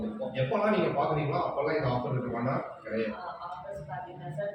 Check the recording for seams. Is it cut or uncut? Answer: cut